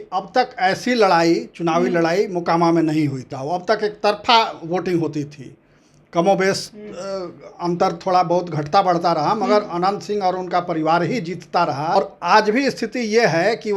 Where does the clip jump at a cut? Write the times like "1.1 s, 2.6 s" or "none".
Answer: 3.3 s, 12.0 s